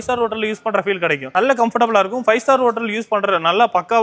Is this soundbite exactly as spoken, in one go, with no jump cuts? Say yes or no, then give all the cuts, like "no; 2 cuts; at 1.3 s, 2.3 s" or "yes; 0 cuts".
no; 1 cut; at 1.3 s